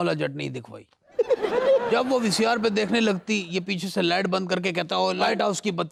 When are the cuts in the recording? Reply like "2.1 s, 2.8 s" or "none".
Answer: none